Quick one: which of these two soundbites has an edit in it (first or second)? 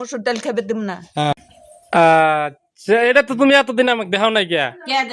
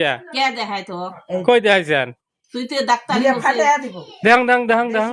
first